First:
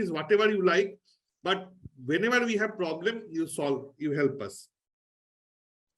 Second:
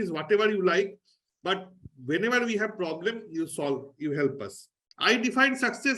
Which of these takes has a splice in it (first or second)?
second